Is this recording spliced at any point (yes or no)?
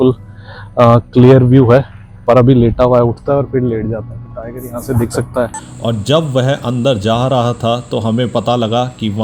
yes